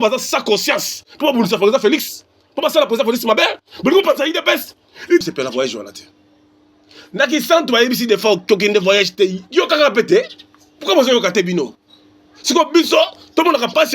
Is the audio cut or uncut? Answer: cut